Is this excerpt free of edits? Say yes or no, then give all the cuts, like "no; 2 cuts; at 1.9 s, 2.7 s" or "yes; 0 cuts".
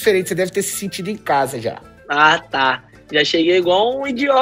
yes; 0 cuts